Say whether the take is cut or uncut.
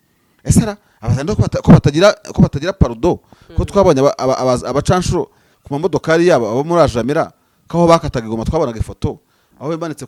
uncut